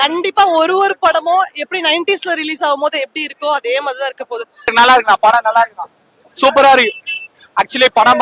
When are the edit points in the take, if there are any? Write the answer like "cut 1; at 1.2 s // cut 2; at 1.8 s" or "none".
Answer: cut 1; at 4.7 s